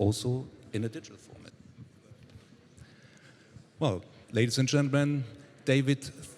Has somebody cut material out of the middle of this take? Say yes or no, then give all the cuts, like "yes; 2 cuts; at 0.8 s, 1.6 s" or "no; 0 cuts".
yes; 1 cut; at 1.5 s